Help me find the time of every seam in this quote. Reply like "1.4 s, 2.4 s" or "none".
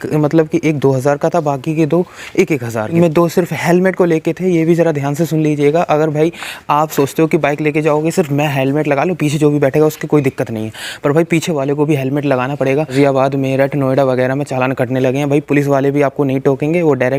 2.9 s, 12.9 s